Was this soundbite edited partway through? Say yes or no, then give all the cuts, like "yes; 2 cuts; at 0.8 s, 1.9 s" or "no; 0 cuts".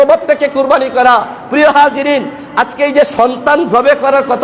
no; 0 cuts